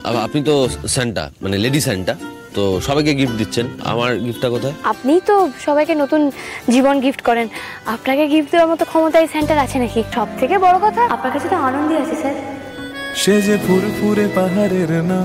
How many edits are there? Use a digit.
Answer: 4